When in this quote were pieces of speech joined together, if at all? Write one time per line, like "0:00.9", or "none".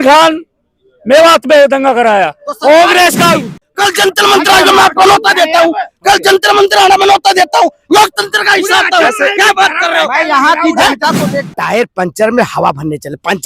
0:03.6
0:11.5